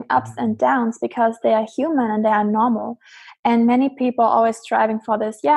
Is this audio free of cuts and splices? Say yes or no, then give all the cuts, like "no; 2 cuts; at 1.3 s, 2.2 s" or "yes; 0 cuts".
yes; 0 cuts